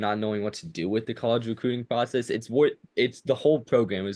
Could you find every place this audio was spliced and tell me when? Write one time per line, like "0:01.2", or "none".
none